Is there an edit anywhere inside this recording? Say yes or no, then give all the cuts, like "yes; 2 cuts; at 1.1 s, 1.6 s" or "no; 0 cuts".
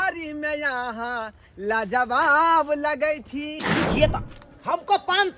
yes; 1 cut; at 3.6 s